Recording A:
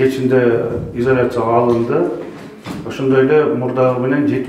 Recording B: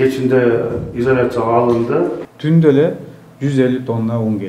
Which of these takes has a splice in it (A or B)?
B